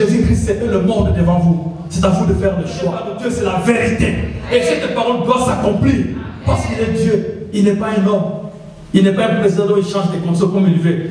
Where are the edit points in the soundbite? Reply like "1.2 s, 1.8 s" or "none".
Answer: 3.1 s